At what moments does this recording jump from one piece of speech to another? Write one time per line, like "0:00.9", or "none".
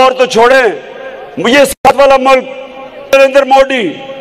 0:03.1